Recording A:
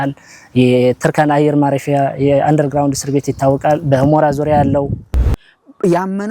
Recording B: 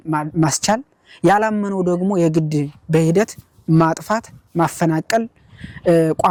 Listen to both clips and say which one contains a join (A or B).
A